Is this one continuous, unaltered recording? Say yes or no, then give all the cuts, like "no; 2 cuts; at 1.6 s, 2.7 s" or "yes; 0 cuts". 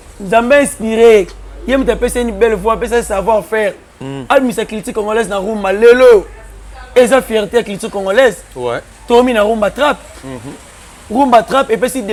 yes; 0 cuts